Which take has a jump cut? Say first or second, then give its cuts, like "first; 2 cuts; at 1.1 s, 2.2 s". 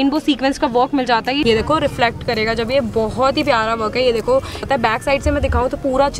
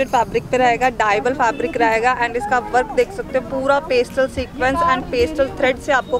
first; 2 cuts; at 1.4 s, 4.6 s